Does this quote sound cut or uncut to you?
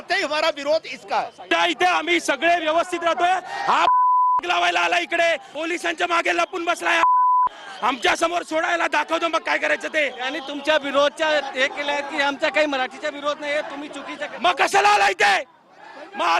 cut